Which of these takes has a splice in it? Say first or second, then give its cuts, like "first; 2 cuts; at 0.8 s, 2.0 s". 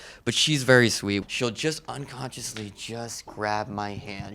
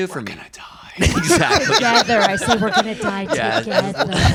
first; 1 cut; at 1.2 s